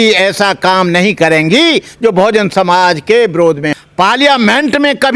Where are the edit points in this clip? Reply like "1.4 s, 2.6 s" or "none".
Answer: 3.7 s